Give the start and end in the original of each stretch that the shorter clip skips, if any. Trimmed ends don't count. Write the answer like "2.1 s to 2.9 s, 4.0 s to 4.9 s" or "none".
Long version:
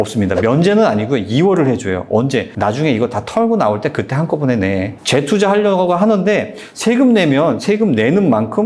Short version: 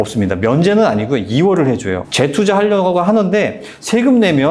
2.0 s to 5.0 s